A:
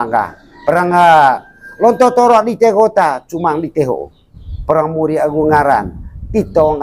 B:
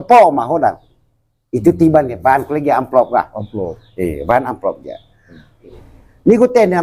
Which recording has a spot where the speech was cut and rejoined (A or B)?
B